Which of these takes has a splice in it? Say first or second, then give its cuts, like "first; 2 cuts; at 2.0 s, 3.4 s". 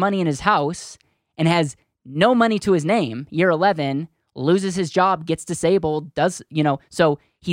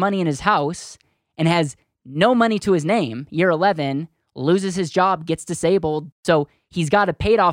second; 1 cut; at 6.1 s